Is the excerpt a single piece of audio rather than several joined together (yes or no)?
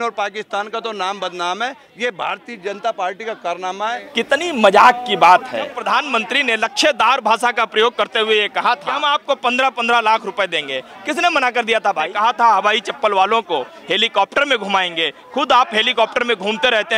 no